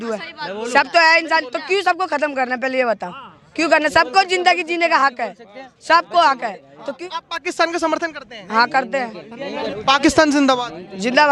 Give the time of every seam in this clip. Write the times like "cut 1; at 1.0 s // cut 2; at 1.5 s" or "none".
cut 1; at 7.0 s // cut 2; at 9.7 s